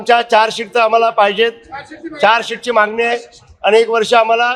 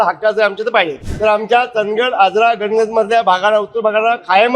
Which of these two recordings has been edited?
second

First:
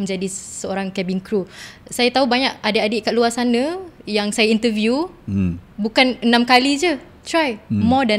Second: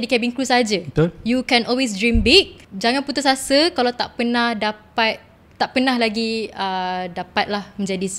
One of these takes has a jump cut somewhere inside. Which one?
second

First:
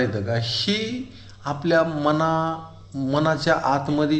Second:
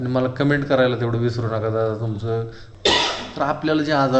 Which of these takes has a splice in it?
second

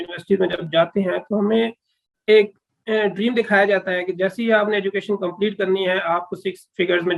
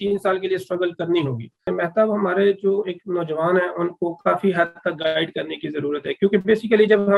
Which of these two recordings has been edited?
second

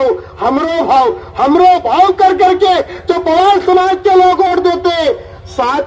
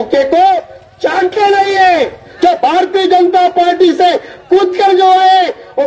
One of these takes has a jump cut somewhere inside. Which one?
second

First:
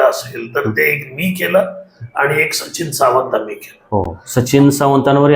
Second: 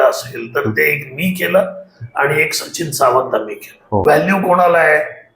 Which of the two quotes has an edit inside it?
second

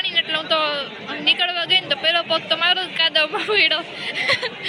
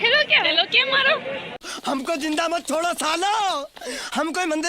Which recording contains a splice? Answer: second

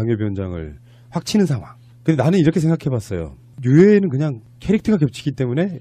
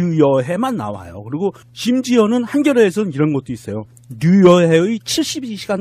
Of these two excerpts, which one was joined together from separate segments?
second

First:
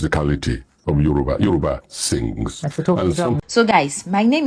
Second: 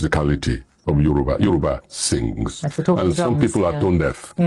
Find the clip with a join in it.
first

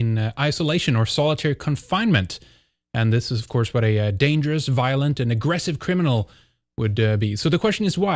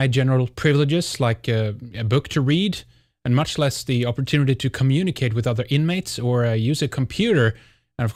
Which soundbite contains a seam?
first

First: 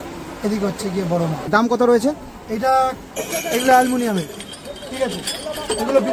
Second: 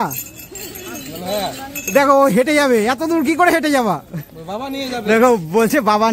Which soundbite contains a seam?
first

